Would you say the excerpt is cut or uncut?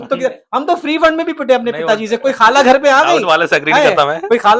uncut